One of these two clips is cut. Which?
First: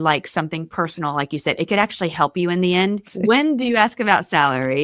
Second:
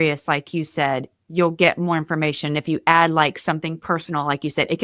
first; 1 cut; at 3.0 s

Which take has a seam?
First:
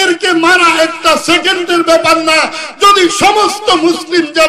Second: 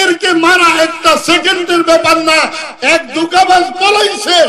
second; 1 cut; at 2.6 s

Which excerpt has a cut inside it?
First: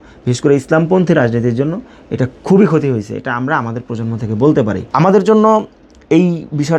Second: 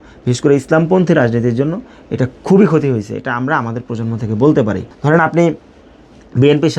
second; 1 cut; at 4.8 s

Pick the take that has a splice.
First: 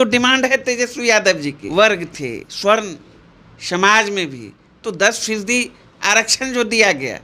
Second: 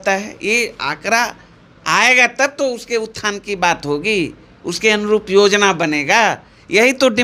first; 1 cut; at 1.6 s

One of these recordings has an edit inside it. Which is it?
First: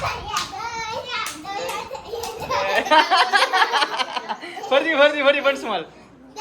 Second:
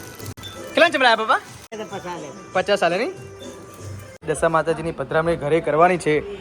second; 2 cuts; at 1.8 s, 4.2 s

